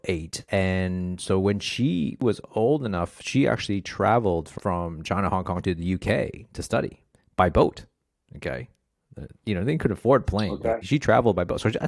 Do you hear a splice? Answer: yes; 3 cuts; at 4.5 s, 5.6 s, 10.8 s

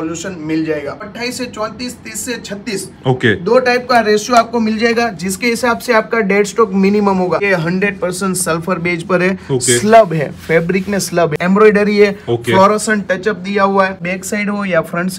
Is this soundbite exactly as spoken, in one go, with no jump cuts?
no; 4 cuts; at 1.0 s, 7.4 s, 11.3 s, 14.0 s

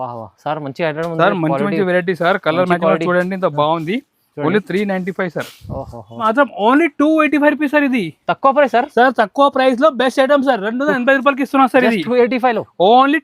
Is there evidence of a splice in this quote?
yes; 1 cut; at 6.2 s

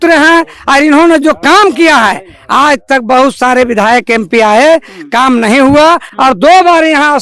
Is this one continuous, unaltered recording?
yes; 0 cuts

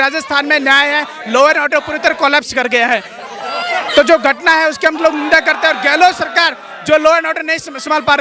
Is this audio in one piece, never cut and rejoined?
yes; 0 cuts

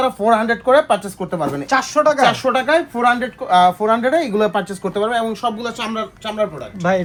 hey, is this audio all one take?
yes; 0 cuts

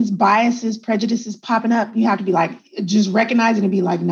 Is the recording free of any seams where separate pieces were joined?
yes; 0 cuts

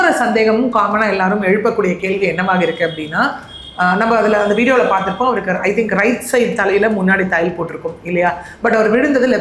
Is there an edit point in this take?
no; 0 cuts

